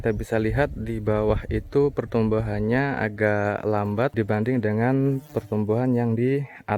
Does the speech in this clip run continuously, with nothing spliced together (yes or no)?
yes